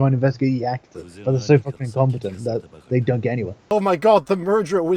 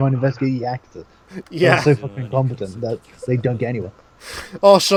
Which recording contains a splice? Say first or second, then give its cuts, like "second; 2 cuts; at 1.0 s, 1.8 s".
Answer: first; 2 cuts; at 1.4 s, 3.6 s